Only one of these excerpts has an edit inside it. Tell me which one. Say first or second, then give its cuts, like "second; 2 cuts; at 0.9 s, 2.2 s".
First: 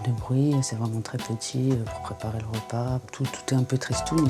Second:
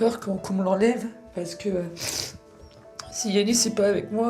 first; 1 cut; at 3.1 s